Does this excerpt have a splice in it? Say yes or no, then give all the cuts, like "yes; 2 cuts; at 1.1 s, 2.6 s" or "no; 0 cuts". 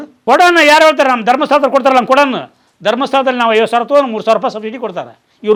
no; 0 cuts